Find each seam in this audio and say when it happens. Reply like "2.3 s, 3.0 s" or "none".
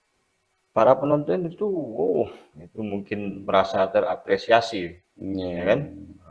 none